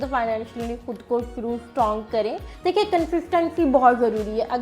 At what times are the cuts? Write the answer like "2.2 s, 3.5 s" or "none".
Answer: 2.5 s

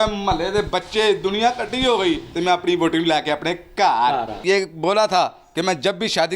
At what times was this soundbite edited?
4.3 s

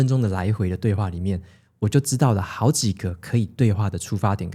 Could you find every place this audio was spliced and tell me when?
none

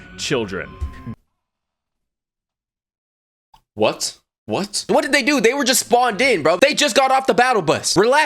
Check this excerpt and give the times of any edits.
4.8 s, 6.6 s

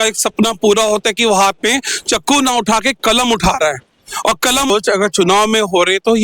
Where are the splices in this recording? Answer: 4.7 s

